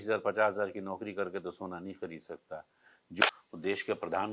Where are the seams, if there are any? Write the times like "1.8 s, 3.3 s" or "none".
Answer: 3.2 s